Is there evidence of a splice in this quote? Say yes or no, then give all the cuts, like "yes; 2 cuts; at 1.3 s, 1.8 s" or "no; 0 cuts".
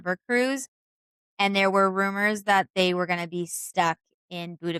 no; 0 cuts